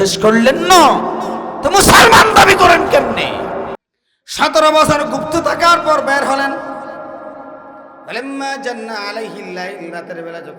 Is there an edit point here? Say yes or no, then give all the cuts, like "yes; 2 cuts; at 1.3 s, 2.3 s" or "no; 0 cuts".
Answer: yes; 1 cut; at 3.8 s